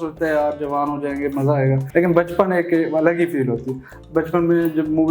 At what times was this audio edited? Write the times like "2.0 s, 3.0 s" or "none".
1.8 s, 4.0 s